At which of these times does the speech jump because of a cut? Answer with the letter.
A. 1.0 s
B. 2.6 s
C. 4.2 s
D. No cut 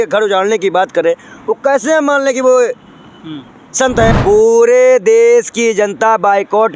C